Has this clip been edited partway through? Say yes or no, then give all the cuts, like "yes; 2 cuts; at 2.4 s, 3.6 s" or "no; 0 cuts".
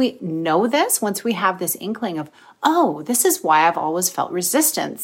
no; 0 cuts